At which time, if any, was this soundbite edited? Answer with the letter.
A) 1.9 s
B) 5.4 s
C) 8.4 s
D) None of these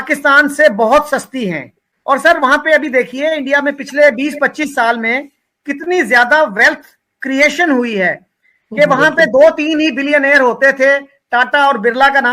A